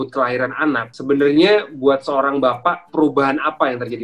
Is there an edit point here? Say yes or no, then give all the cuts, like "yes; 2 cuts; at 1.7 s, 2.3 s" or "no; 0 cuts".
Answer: yes; 2 cuts; at 0.9 s, 2.8 s